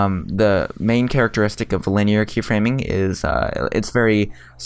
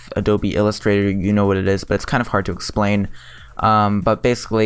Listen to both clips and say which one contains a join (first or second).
first